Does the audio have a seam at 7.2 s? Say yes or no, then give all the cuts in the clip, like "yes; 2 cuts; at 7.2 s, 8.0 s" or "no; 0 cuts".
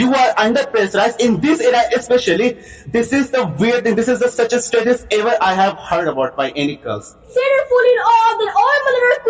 yes; 1 cut; at 7.2 s